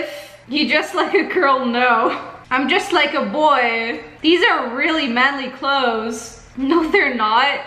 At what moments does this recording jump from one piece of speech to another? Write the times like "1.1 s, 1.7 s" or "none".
none